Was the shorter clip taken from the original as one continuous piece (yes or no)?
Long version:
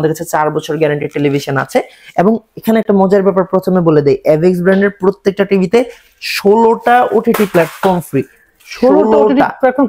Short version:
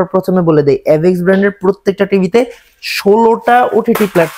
yes